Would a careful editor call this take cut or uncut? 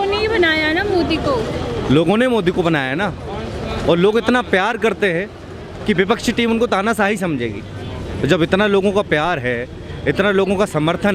uncut